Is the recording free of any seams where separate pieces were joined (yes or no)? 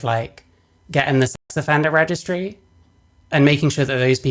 yes